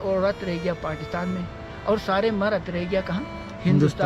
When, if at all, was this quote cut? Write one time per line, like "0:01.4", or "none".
none